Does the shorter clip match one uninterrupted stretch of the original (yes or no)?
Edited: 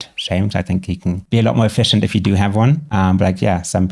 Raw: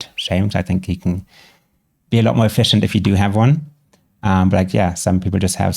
no